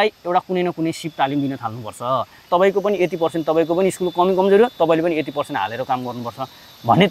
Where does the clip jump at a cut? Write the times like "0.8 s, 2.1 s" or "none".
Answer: 2.5 s